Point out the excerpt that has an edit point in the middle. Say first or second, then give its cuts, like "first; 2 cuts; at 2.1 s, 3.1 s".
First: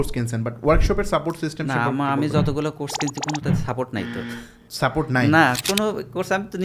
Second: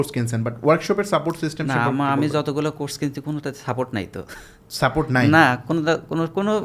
first; 1 cut; at 5.6 s